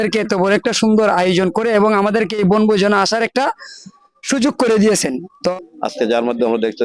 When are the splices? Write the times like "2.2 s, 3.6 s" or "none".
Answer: 5.5 s